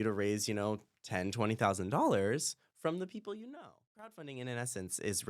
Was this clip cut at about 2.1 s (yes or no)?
no